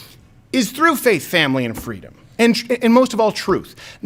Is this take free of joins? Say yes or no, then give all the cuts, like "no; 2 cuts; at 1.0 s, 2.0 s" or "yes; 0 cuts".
yes; 0 cuts